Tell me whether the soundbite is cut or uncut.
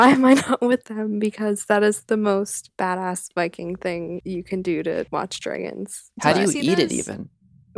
cut